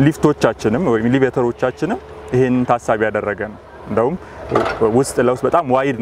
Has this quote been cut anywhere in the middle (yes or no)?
no